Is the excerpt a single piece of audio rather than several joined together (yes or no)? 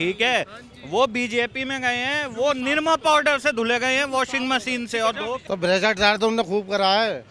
no